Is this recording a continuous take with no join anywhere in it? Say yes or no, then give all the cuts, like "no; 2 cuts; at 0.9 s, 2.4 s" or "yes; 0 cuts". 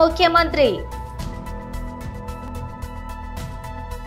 no; 1 cut; at 2.5 s